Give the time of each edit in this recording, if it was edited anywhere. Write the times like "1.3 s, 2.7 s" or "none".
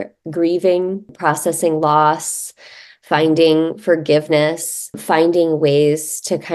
1.1 s, 5.0 s